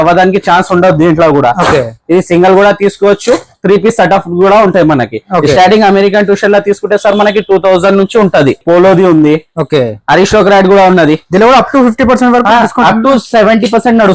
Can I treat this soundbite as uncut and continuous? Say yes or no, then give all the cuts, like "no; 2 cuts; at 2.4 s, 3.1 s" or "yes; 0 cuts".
no; 1 cut; at 8.6 s